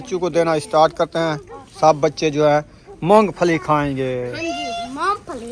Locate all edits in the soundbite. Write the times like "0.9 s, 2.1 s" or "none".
none